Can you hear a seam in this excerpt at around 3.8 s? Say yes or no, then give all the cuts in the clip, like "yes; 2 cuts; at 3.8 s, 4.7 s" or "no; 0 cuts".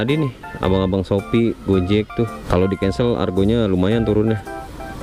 no; 1 cut; at 2.4 s